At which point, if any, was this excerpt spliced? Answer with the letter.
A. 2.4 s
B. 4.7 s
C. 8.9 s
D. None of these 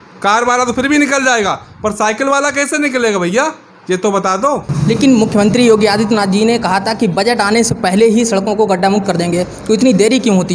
B